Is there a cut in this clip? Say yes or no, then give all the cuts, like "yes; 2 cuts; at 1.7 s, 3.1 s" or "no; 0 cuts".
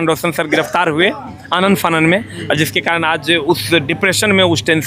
no; 0 cuts